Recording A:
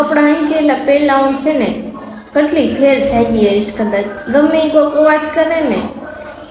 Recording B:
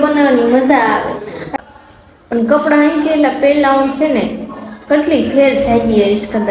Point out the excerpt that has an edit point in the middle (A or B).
B